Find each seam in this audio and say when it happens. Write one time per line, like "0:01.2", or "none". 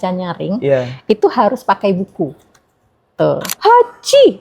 0:03.5